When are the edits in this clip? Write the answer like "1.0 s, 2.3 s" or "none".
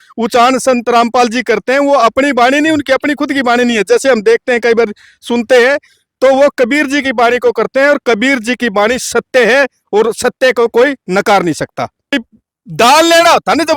12.1 s